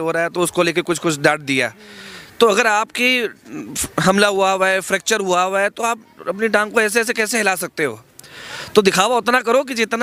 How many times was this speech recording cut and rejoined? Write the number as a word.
zero